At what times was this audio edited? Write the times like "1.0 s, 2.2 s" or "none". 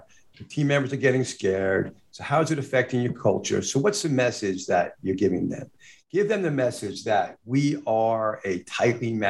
none

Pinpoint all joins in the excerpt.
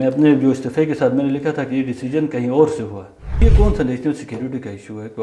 3.4 s

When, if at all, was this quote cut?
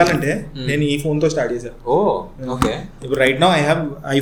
none

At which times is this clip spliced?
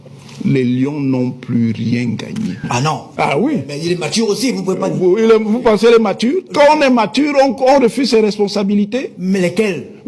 2.6 s

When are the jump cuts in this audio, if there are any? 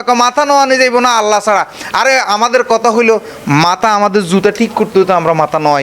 none

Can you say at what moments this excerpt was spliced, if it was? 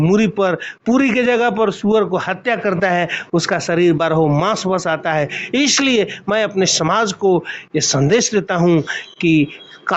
none

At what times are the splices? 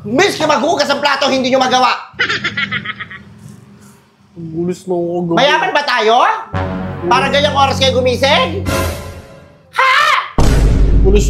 none

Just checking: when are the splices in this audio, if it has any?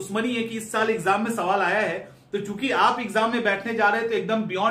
none

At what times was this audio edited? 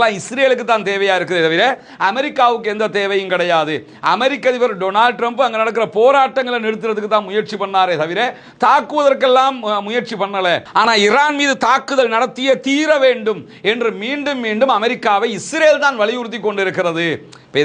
none

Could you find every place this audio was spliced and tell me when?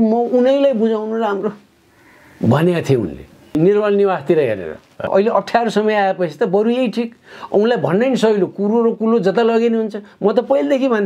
3.5 s, 5.1 s

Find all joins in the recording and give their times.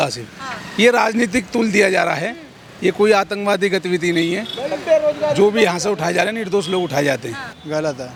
none

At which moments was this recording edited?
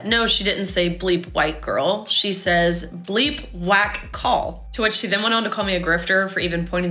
4.5 s

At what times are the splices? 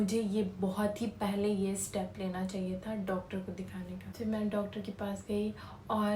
none

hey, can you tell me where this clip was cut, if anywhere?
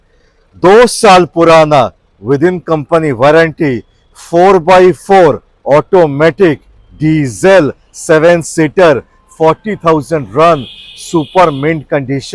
none

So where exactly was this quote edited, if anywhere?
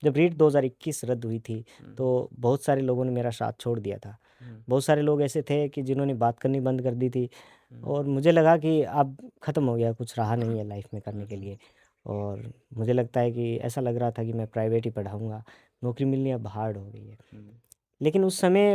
none

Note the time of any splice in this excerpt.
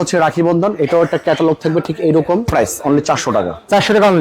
2.5 s

